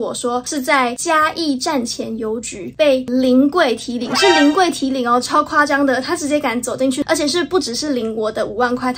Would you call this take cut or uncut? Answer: uncut